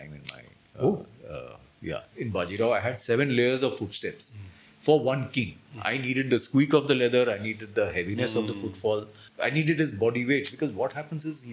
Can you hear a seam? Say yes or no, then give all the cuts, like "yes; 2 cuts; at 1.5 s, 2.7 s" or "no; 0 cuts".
yes; 2 cuts; at 2.1 s, 9.2 s